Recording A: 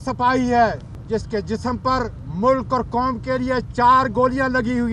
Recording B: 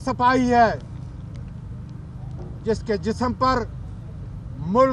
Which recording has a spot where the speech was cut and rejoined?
A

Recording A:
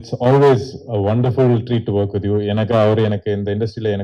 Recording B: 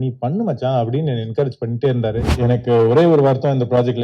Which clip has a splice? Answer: B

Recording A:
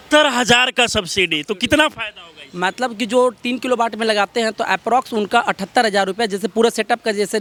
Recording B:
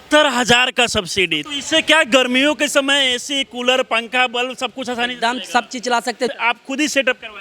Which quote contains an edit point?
B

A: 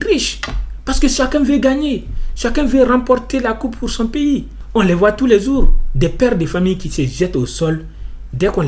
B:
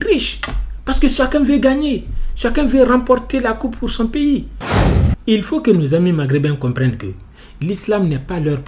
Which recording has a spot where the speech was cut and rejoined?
B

